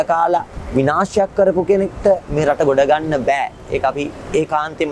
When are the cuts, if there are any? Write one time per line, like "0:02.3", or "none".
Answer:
none